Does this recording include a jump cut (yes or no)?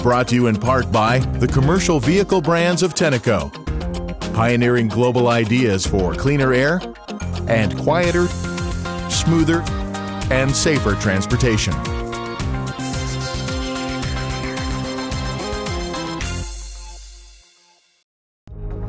no